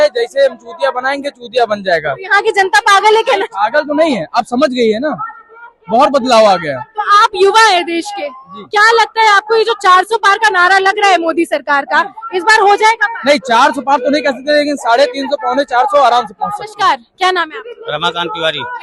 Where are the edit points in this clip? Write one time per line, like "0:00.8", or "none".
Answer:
none